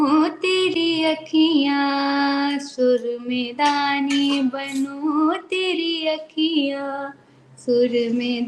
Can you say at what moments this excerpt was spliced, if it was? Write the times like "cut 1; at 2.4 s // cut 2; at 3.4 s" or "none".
none